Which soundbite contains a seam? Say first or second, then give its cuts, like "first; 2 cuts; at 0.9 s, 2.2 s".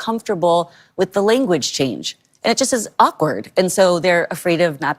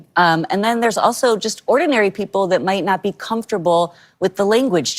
second; 1 cut; at 1.9 s